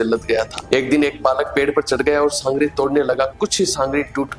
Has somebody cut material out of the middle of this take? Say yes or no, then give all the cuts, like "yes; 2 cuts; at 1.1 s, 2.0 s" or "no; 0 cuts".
no; 0 cuts